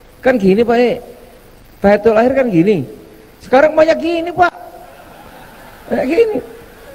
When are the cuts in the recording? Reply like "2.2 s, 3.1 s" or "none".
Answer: none

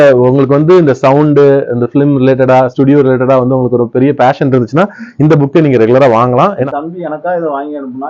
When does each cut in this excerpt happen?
6.6 s

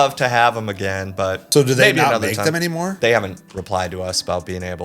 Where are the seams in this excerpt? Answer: 1.4 s, 2.9 s

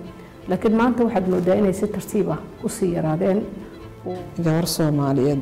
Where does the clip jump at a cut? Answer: 4.0 s

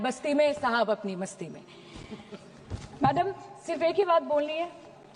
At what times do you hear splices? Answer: none

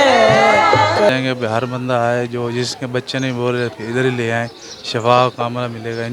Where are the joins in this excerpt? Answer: 1.1 s

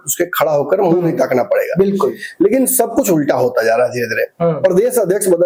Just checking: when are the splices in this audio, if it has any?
none

